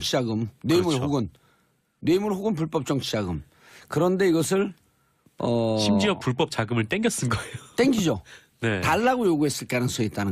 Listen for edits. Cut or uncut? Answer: uncut